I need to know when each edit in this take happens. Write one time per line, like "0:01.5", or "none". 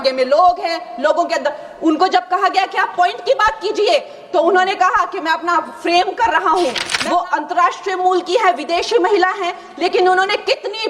0:06.9